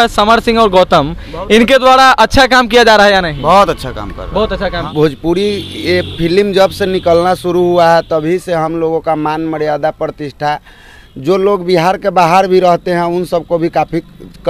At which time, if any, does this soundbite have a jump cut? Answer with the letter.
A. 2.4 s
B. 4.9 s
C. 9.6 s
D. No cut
B